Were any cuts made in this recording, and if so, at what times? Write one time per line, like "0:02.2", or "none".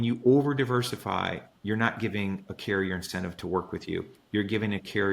0:01.5

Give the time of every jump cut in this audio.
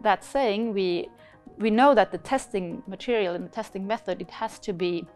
none

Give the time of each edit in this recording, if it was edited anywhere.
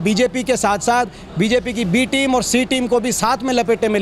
none

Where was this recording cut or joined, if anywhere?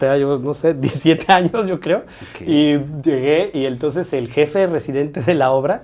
none

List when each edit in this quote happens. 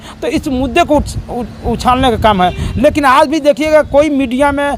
none

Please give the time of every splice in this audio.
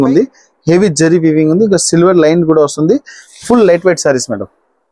none

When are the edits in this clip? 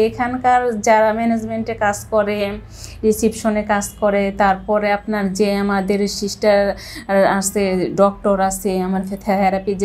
none

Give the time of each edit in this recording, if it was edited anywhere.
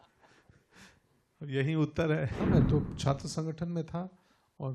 0:02.4

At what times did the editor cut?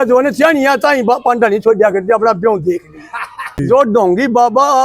0:03.5

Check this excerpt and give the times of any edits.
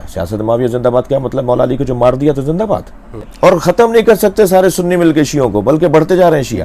0:03.2

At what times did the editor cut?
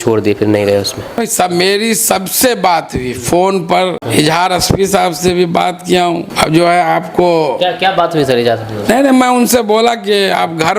0:01.3
0:04.0
0:06.3

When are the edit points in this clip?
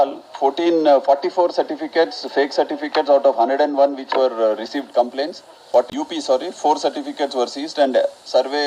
0:05.9

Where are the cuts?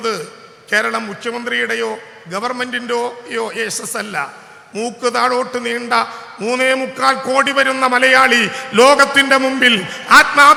none

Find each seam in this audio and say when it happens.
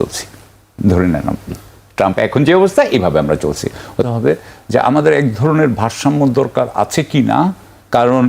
0:04.1

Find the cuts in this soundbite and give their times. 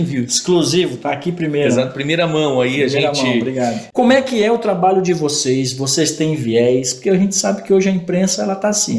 0:03.8

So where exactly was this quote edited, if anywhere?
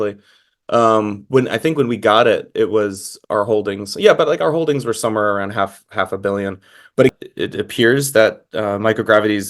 0:07.1

